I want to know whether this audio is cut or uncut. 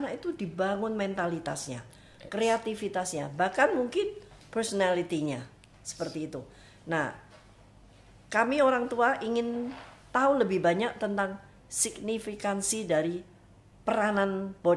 uncut